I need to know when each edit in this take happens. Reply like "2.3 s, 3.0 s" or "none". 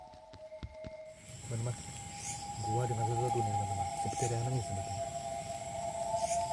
1.2 s